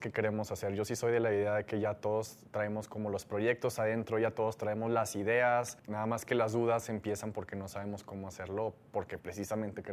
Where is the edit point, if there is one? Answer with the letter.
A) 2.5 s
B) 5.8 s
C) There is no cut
B